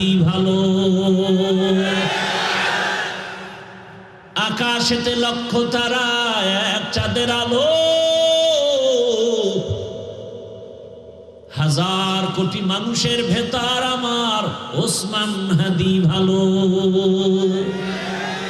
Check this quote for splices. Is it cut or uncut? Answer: uncut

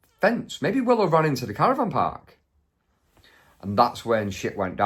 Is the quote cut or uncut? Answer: uncut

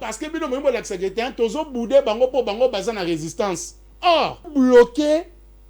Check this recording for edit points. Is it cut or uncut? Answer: cut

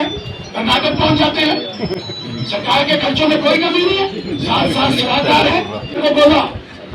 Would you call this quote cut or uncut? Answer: cut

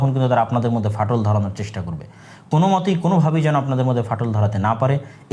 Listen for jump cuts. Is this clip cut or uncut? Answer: uncut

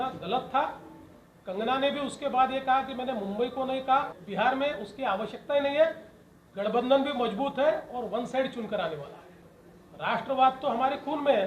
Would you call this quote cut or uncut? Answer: cut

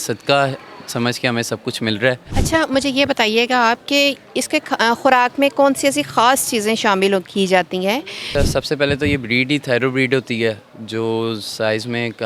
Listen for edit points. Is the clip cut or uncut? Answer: cut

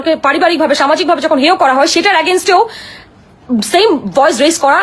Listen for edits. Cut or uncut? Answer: uncut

